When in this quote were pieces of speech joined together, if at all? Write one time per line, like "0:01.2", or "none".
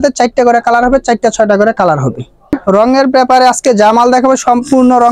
0:02.6